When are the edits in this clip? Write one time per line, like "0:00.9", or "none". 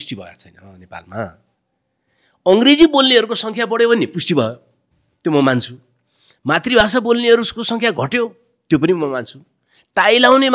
none